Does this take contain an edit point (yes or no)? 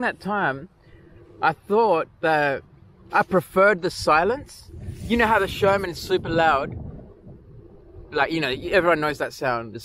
no